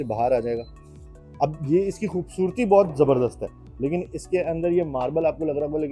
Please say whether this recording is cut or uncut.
uncut